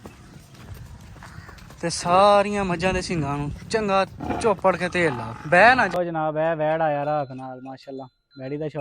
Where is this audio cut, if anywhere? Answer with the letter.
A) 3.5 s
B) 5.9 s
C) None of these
B